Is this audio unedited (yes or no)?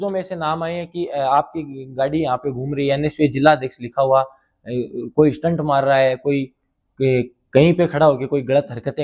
yes